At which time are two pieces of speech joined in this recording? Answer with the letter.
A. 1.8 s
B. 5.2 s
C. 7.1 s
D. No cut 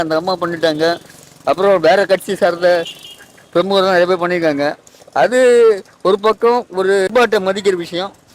C